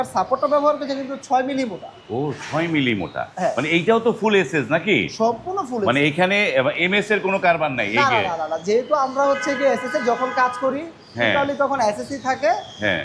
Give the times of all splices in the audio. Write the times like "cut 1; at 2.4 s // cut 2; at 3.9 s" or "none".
none